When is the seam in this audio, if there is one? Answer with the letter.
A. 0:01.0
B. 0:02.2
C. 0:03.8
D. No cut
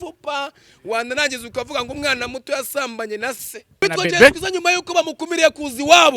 C